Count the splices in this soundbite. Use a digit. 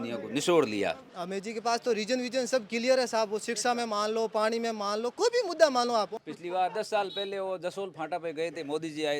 2